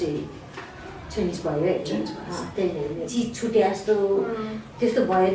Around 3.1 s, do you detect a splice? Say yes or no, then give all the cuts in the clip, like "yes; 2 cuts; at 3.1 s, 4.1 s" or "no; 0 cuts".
yes; 1 cut; at 3.1 s